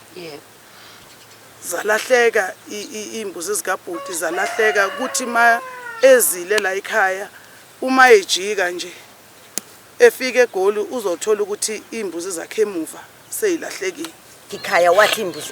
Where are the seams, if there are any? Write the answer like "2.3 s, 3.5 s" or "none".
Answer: 14.6 s